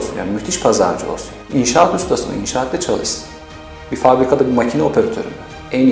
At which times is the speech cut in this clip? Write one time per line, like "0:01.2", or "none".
0:01.3